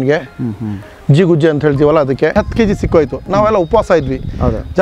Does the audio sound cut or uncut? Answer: cut